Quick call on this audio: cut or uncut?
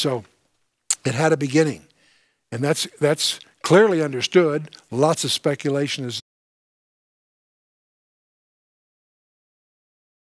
uncut